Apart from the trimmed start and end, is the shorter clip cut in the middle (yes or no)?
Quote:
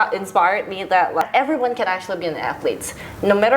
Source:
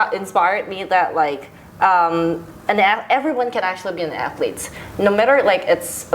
yes